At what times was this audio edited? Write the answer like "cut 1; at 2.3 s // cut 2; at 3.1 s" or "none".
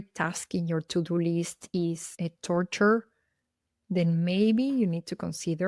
none